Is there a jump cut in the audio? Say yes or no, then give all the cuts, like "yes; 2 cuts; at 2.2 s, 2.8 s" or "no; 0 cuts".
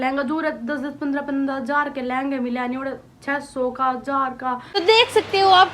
yes; 1 cut; at 4.8 s